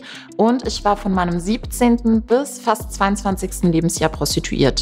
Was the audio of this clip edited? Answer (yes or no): no